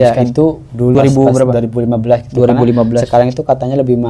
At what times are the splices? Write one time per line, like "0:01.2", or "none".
0:00.9